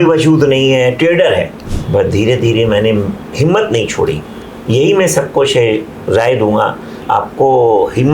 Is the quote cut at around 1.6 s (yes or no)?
yes